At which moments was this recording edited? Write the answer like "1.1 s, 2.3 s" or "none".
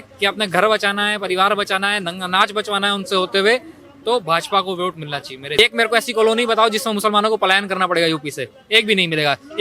5.6 s